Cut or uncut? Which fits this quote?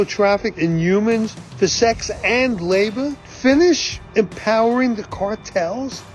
cut